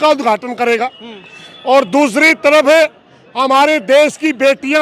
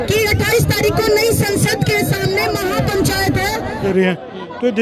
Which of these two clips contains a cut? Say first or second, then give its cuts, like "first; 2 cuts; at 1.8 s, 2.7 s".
second; 1 cut; at 3.8 s